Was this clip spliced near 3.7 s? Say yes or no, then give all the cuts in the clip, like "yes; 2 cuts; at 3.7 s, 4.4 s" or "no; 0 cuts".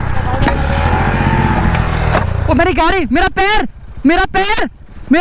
no; 0 cuts